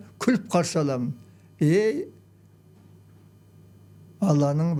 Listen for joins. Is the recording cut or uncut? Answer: uncut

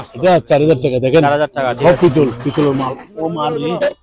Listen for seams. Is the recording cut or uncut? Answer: uncut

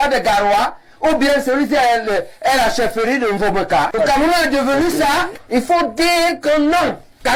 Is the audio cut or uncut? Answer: cut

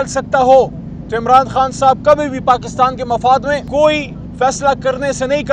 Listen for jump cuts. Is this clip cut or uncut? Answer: cut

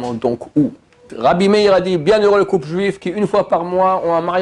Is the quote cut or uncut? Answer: cut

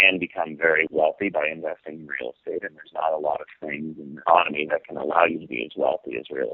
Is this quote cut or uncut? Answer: cut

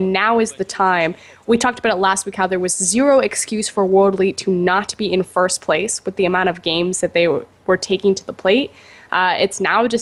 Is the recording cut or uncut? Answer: uncut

